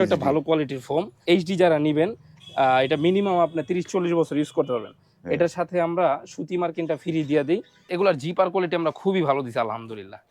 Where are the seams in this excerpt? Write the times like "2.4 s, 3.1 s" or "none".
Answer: 1.2 s, 7.9 s